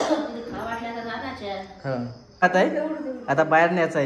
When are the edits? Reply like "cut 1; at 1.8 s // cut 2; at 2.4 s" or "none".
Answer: cut 1; at 2.4 s